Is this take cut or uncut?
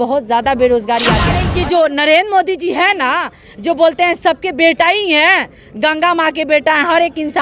cut